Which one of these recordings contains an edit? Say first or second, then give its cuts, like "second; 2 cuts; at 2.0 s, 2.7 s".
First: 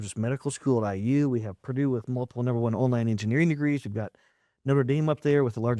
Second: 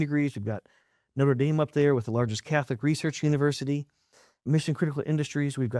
second; 1 cut; at 4.4 s